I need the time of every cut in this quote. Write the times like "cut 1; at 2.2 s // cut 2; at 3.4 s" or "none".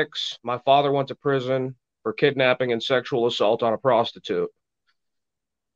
none